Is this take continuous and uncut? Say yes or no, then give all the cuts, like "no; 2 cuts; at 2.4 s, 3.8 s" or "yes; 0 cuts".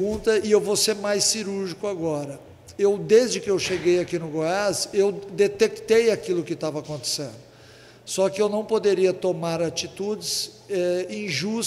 yes; 0 cuts